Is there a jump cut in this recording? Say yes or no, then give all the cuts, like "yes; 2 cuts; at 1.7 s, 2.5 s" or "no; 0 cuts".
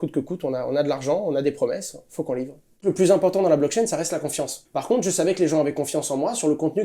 yes; 2 cuts; at 2.8 s, 4.5 s